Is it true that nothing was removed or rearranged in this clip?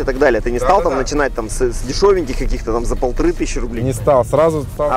yes; 0 cuts

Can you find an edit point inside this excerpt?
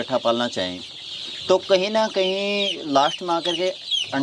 no; 0 cuts

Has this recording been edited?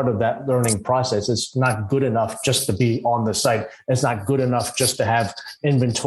no; 0 cuts

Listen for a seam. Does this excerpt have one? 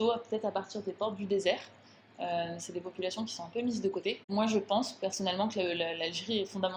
yes; 1 cut; at 4.2 s

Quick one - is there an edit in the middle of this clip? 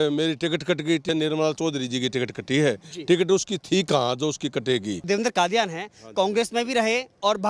yes; 2 cuts; at 1.0 s, 5.0 s

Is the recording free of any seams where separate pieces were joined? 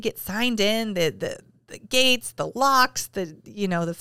yes; 0 cuts

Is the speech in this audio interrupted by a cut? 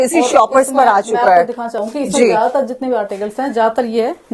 no; 0 cuts

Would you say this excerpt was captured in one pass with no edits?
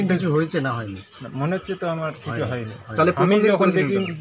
yes; 0 cuts

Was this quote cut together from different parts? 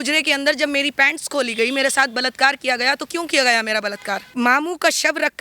yes; 1 cut; at 4.3 s

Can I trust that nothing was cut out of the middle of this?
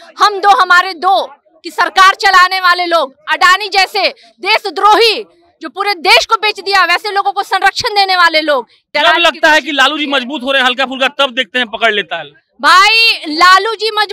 no; 1 cut; at 8.8 s

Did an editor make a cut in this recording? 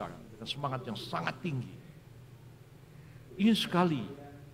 no; 0 cuts

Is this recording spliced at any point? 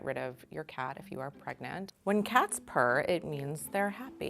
yes; 1 cut; at 1.9 s

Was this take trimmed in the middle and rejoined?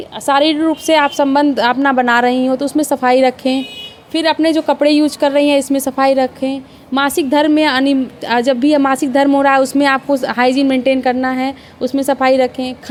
no; 0 cuts

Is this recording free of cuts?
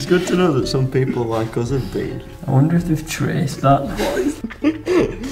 no; 1 cut; at 4.4 s

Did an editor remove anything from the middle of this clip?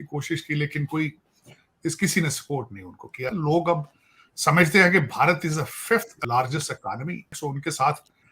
yes; 3 cuts; at 3.3 s, 6.1 s, 7.3 s

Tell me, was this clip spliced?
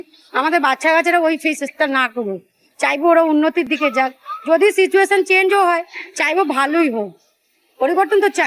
no; 0 cuts

